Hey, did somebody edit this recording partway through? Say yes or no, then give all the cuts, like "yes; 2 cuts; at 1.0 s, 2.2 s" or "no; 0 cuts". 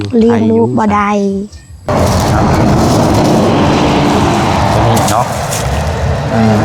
yes; 1 cut; at 1.9 s